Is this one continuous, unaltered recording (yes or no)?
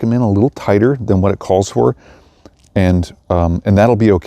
yes